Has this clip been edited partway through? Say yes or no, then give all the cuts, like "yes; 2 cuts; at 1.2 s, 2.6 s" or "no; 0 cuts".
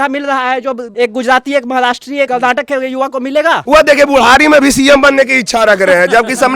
yes; 3 cuts; at 0.9 s, 2.3 s, 3.6 s